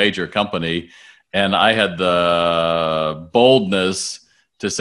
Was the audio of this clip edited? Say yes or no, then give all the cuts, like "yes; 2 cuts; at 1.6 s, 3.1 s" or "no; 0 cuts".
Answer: no; 0 cuts